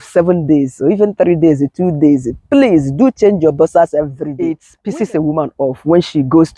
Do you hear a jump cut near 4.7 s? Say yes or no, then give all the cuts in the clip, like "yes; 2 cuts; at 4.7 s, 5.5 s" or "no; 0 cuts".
yes; 1 cut; at 4.7 s